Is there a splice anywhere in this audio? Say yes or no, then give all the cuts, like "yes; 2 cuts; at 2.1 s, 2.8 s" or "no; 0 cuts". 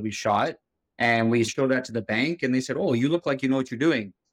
yes; 1 cut; at 1.5 s